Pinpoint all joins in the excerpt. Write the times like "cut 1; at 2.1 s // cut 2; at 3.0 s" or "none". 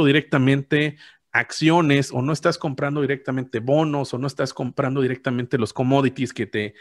none